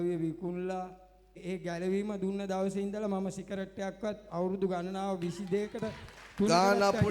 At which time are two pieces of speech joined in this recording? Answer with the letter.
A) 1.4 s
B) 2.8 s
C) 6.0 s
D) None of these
A